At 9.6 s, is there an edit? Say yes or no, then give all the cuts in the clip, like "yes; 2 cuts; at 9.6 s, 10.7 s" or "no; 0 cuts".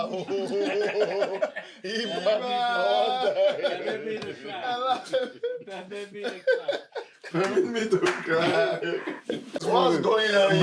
yes; 1 cut; at 9.6 s